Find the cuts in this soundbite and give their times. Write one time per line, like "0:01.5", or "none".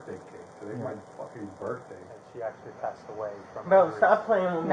0:02.2